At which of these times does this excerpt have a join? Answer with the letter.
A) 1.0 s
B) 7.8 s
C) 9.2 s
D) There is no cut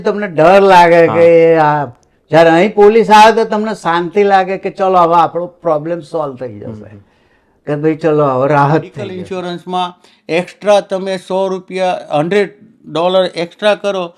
C